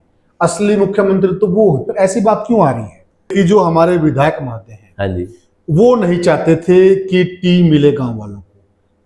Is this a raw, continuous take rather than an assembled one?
no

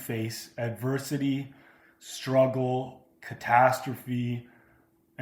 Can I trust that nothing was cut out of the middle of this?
yes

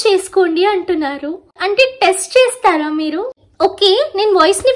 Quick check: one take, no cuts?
no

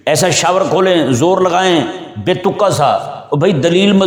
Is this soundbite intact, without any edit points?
yes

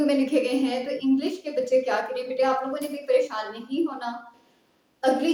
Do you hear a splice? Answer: no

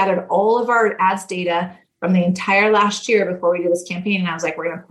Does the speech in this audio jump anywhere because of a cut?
no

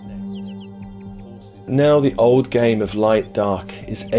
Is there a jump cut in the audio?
no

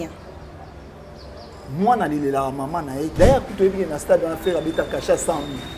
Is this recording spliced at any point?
yes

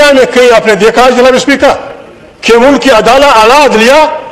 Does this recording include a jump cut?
no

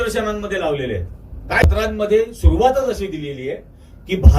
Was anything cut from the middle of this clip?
yes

